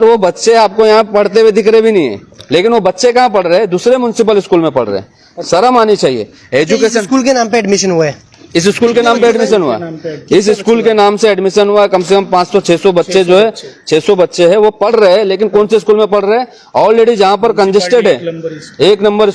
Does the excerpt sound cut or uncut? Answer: uncut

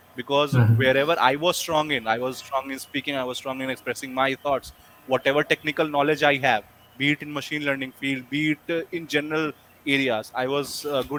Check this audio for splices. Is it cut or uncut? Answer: uncut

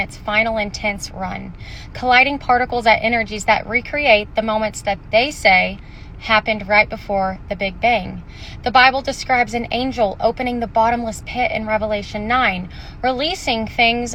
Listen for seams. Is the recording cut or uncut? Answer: uncut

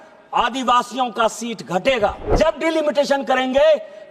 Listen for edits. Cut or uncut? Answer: cut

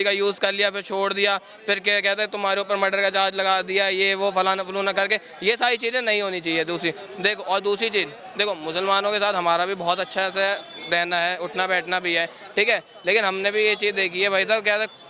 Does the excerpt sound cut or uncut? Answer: uncut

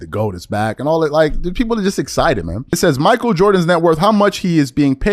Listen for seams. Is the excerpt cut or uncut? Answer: cut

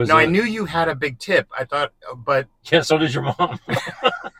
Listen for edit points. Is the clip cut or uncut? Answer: uncut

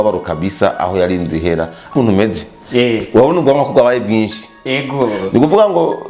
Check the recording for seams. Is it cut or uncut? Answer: cut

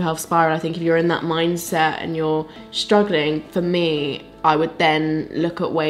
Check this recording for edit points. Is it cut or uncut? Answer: uncut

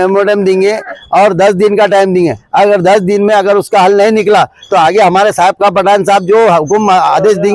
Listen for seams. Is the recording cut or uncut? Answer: uncut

